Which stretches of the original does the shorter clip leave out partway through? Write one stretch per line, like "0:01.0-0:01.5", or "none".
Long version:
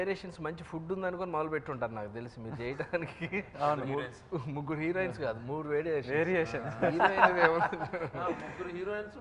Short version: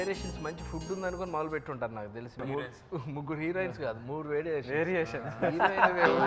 0:02.4-0:03.8